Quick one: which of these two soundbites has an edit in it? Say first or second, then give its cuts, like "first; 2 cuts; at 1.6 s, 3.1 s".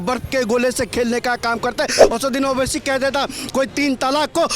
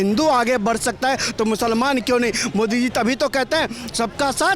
first; 1 cut; at 2.0 s